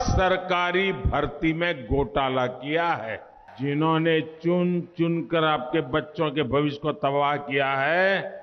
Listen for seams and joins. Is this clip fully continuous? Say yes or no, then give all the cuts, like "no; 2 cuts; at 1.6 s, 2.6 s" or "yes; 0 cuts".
no; 1 cut; at 3.4 s